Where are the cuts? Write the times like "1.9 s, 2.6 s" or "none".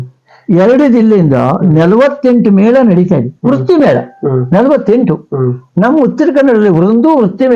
none

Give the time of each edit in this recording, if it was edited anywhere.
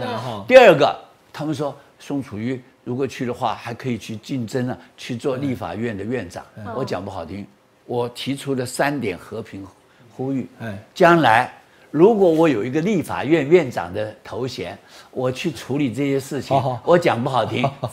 none

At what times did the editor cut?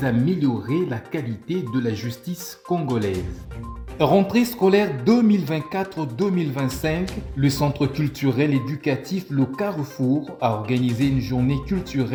none

